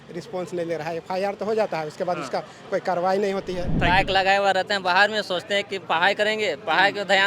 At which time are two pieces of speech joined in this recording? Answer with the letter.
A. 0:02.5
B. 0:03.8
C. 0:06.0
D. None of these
B